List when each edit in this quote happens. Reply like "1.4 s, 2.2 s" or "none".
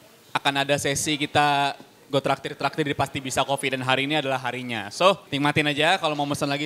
5.3 s